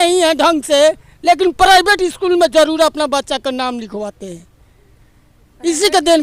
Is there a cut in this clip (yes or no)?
no